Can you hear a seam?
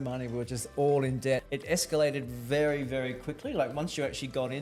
yes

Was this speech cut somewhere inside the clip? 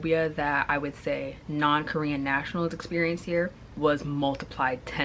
yes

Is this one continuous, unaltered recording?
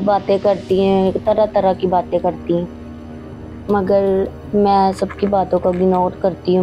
yes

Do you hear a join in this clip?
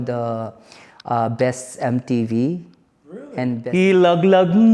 yes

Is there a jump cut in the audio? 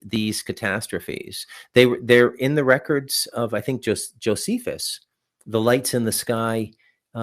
no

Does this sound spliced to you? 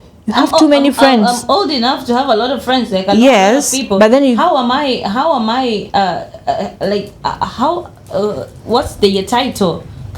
no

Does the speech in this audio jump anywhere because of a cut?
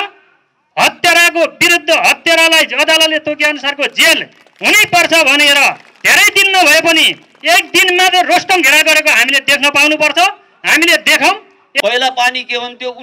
yes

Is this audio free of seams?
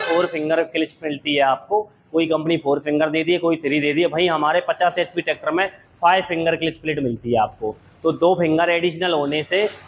yes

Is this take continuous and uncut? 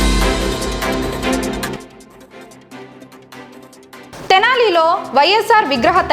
no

